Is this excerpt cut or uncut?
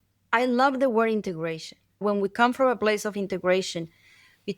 cut